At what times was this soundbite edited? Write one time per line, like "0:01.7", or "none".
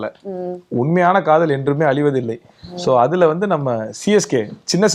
none

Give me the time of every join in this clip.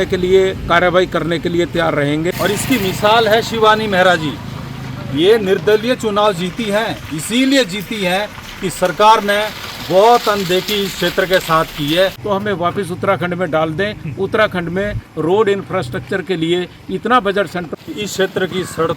0:02.3
0:12.2
0:17.6

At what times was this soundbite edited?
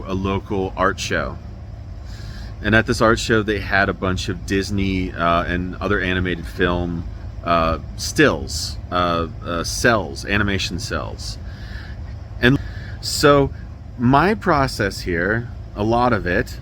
0:12.6

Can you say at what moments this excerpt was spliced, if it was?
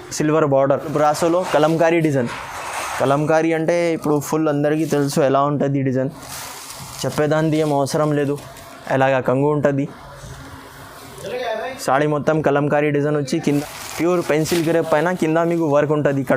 0:00.9
0:13.4

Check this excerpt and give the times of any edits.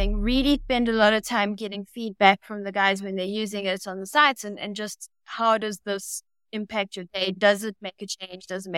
none

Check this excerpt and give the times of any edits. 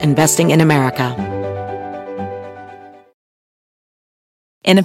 0:01.1

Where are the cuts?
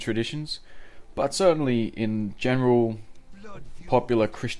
0:02.4

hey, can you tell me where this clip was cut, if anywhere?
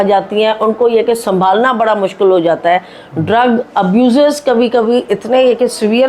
none

